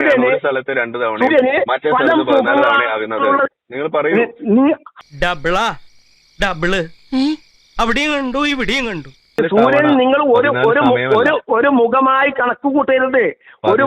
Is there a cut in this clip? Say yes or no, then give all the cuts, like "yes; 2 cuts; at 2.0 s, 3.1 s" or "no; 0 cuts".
yes; 2 cuts; at 5.0 s, 9.4 s